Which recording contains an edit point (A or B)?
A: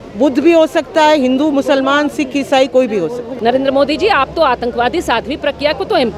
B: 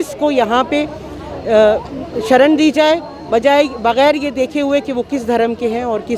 A